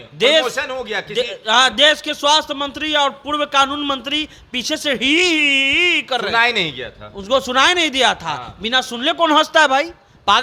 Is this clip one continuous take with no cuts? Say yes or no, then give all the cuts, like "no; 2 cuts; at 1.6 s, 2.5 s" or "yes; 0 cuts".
yes; 0 cuts